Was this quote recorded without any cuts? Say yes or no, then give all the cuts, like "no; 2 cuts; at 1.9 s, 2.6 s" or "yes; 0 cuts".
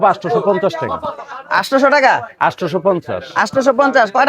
yes; 0 cuts